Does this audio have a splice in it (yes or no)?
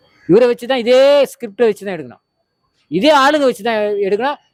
no